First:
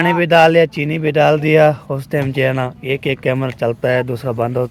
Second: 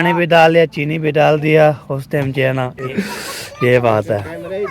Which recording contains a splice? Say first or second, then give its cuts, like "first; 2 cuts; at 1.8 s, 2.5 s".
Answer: second; 1 cut; at 2.9 s